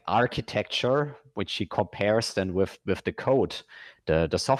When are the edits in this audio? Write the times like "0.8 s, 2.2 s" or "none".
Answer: none